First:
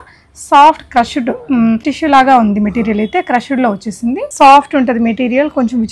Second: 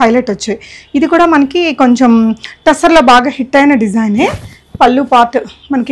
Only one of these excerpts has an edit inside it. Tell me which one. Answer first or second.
first